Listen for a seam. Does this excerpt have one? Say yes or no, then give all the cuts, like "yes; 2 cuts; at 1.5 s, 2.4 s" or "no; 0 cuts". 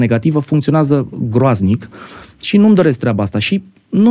no; 0 cuts